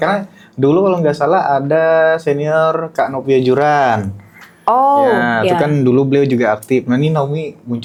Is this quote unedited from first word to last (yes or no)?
yes